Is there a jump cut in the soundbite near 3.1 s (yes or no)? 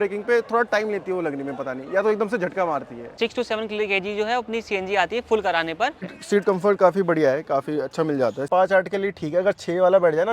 yes